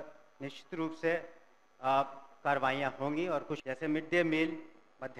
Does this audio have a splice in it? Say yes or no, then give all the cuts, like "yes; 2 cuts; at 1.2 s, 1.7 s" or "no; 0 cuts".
yes; 1 cut; at 3.5 s